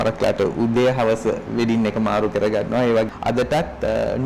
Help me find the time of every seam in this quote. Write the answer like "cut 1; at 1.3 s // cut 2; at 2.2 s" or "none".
cut 1; at 3.1 s